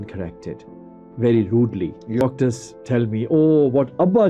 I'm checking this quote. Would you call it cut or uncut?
cut